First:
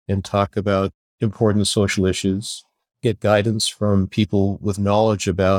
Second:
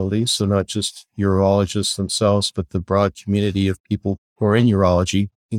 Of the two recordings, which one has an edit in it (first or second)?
first